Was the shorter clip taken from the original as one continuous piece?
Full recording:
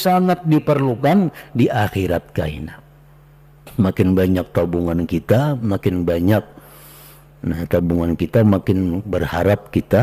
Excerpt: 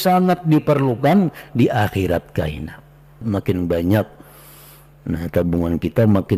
no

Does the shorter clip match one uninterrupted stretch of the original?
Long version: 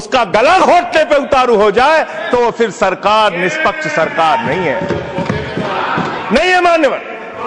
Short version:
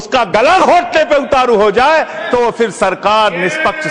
yes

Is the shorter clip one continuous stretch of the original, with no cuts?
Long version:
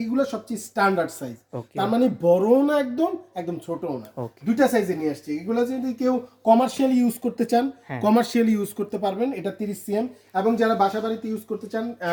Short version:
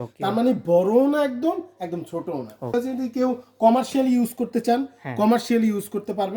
no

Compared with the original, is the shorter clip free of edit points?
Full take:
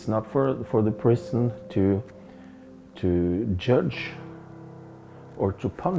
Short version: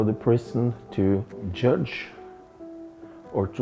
no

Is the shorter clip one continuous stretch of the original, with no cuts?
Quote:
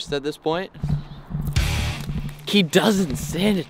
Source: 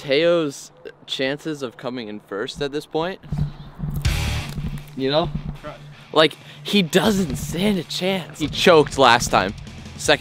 no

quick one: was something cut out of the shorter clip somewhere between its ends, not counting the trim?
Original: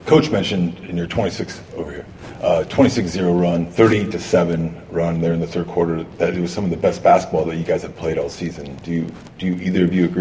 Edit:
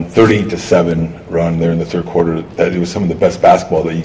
no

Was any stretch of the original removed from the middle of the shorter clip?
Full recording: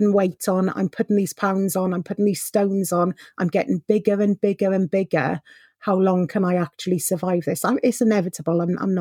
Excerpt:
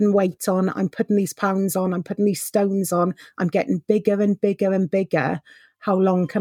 no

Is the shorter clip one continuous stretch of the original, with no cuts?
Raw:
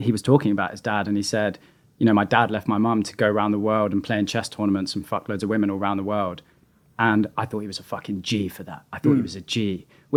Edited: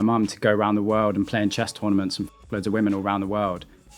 yes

